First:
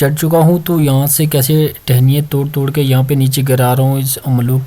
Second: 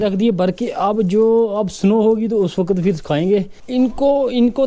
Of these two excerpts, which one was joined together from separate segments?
second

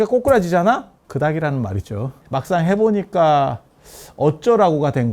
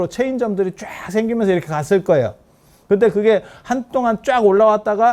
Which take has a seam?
first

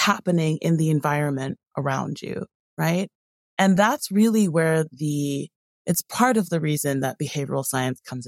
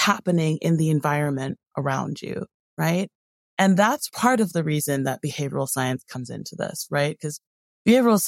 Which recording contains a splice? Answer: second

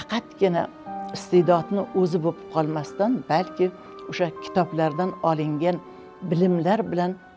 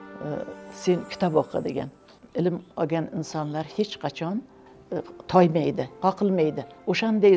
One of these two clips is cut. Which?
second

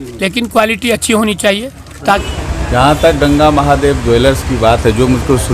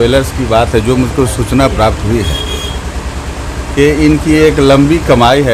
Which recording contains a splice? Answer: first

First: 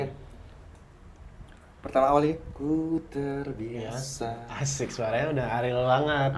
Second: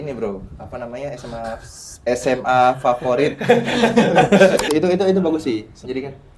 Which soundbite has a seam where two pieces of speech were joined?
second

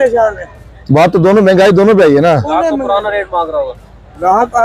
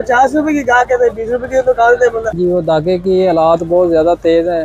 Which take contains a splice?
second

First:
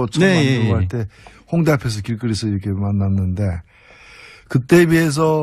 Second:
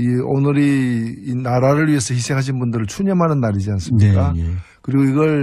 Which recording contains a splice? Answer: second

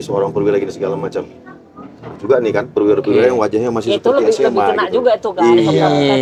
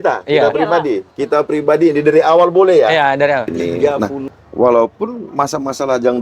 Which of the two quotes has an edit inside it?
second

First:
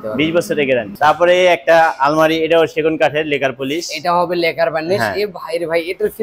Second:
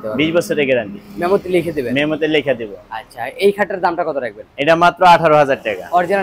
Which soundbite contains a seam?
first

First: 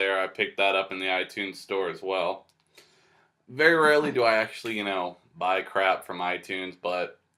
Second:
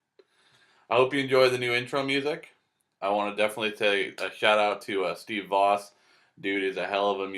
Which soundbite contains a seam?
second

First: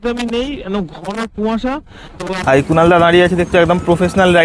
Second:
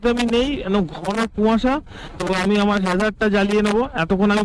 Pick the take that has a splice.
first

